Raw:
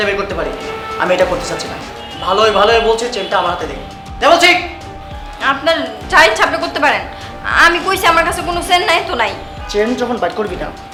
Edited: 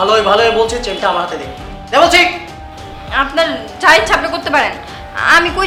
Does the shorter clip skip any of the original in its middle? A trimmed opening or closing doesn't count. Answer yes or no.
no